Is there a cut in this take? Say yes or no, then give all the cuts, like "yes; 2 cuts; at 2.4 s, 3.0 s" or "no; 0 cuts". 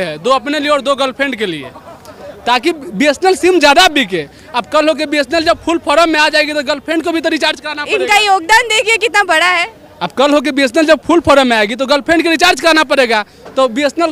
no; 0 cuts